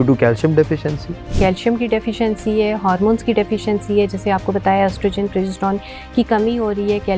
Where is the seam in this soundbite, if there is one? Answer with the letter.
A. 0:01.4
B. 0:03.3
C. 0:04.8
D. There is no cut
A